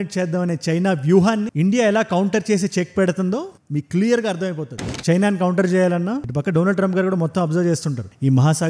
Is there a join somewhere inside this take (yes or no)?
yes